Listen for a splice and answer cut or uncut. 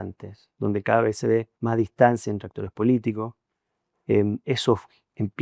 cut